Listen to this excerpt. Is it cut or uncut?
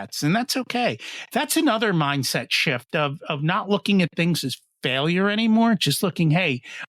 uncut